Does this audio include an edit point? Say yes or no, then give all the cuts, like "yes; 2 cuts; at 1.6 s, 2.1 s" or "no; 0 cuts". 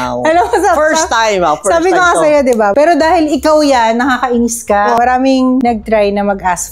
yes; 2 cuts; at 2.7 s, 5.0 s